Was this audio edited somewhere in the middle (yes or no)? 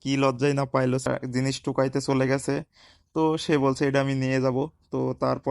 yes